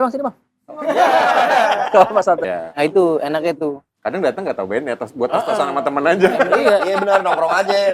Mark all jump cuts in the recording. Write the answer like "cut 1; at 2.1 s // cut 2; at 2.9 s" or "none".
cut 1; at 2.4 s

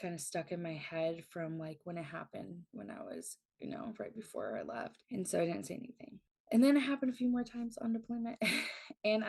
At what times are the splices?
none

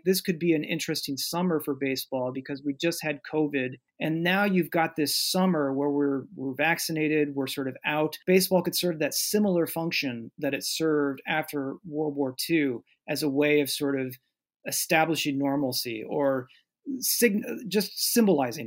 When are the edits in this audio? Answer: cut 1; at 3.8 s // cut 2; at 8.2 s

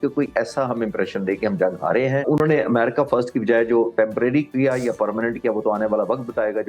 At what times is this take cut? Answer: cut 1; at 2.2 s

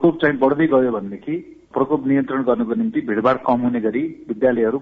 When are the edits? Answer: cut 1; at 1.6 s

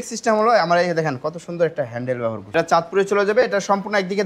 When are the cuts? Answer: cut 1; at 2.4 s

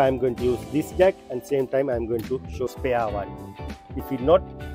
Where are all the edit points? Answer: cut 1; at 2.7 s

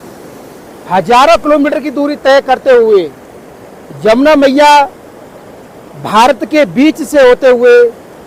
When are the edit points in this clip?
none

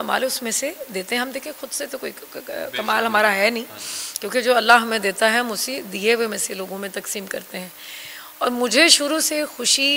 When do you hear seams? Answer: none

